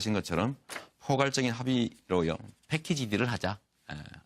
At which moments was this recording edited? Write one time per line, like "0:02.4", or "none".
none

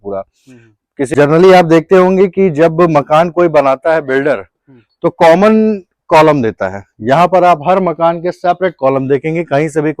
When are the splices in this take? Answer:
0:01.1

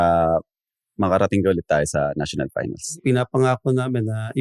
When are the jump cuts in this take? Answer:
0:02.9

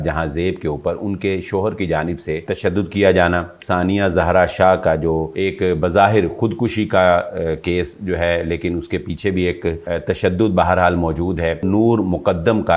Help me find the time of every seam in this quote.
0:02.4
0:03.6
0:05.3
0:09.8
0:11.6

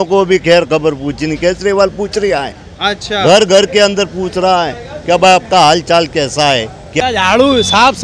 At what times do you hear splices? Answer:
0:06.8

